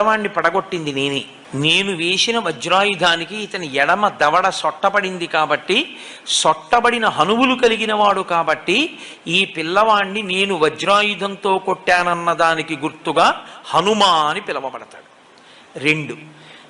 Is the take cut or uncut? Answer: cut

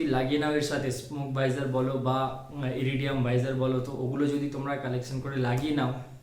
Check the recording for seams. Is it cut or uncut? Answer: uncut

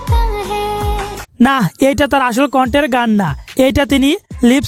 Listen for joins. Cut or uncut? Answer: uncut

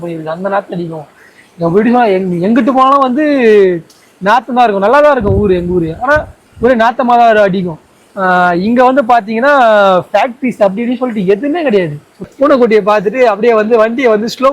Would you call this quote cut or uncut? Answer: cut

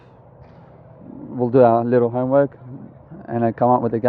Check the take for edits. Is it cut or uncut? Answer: uncut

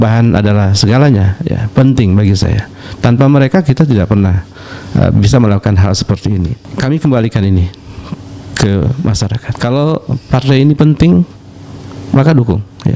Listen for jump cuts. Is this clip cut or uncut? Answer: cut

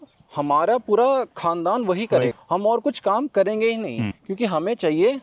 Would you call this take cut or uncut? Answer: uncut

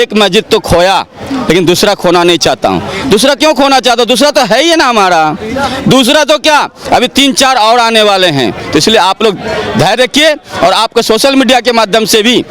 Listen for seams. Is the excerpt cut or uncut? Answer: uncut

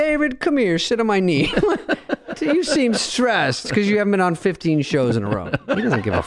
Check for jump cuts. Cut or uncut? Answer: uncut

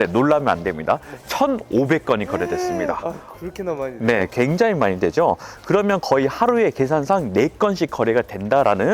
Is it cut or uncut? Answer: uncut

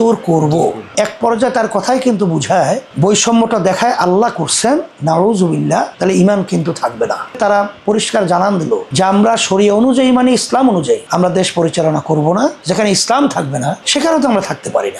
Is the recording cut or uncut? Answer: cut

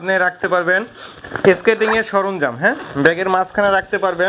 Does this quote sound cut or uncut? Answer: uncut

